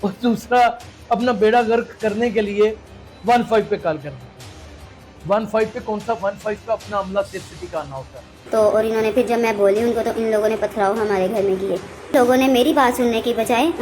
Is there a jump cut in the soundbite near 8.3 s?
yes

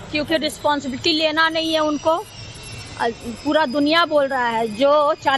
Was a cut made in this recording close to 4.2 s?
no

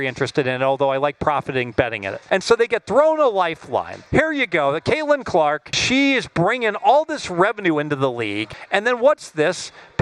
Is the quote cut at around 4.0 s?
yes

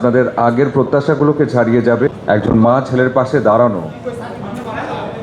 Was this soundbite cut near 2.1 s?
yes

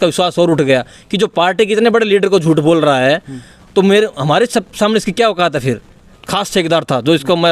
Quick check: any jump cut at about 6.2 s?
yes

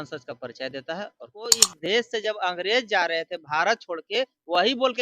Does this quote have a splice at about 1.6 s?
yes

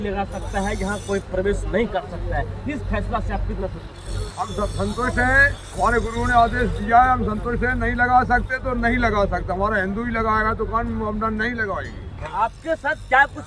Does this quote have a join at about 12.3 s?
yes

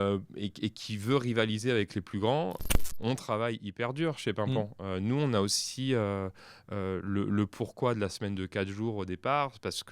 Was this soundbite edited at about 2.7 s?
yes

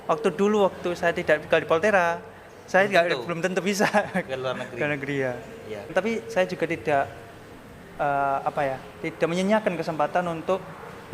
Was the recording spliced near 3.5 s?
no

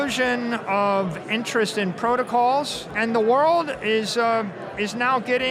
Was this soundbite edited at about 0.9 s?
no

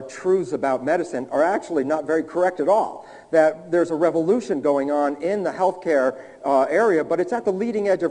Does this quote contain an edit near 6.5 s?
no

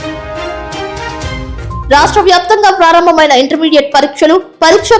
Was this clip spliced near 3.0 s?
no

